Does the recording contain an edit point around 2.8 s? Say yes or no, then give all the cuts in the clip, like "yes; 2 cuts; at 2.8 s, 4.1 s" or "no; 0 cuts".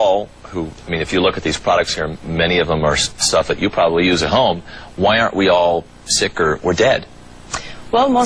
no; 1 cut; at 6.9 s